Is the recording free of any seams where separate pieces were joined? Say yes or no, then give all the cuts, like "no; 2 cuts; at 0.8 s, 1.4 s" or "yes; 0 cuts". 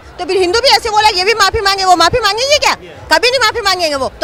yes; 0 cuts